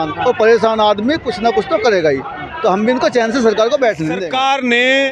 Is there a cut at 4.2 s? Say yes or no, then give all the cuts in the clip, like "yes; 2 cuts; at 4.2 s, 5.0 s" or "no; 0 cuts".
yes; 1 cut; at 4.2 s